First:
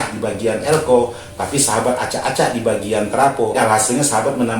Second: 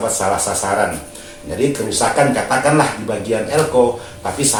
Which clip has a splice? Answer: first; 1 cut; at 3.5 s

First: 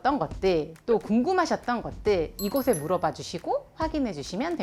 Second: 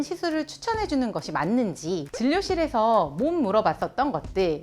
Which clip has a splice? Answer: second; 1 cut; at 2.1 s

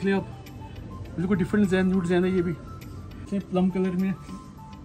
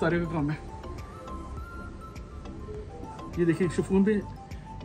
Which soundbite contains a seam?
first; 1 cut; at 3.3 s

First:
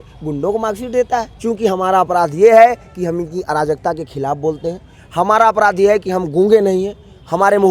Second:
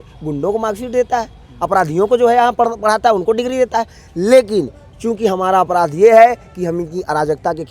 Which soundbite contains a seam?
first; 1 cut; at 1.3 s

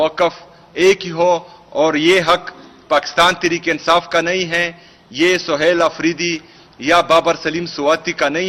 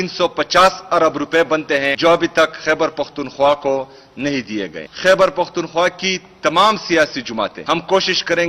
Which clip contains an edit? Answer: second; 3 cuts; at 1.9 s, 4.8 s, 7.6 s

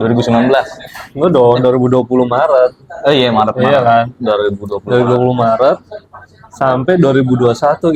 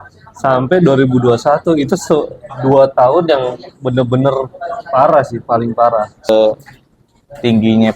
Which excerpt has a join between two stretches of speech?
second; 1 cut; at 6.3 s

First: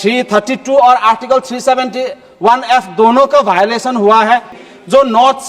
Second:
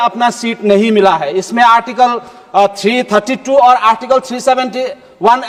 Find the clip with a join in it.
first; 1 cut; at 4.6 s

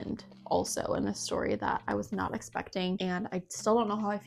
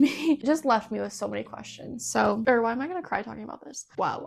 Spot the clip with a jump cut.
second; 1 cut; at 2.4 s

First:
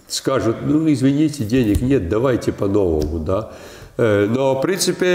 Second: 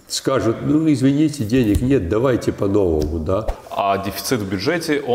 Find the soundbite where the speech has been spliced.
second; 1 cut; at 3.6 s

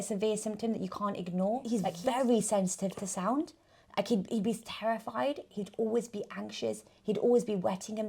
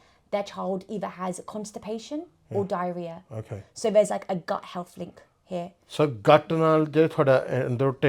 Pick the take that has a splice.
first; 1 cut; at 1.6 s

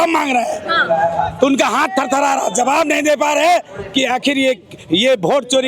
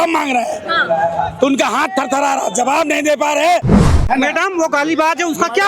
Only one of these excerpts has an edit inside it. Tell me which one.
second; 1 cut; at 3.8 s

